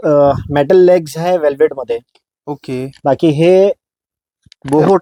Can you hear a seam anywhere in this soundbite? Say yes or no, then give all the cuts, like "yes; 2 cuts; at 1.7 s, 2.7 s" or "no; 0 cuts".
no; 0 cuts